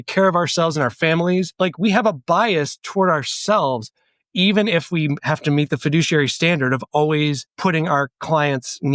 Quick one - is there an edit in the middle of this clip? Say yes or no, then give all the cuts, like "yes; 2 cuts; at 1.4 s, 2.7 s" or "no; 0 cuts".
yes; 2 cuts; at 1.5 s, 7.5 s